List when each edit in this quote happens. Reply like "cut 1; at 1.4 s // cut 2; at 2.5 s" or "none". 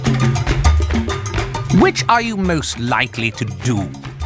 cut 1; at 1.4 s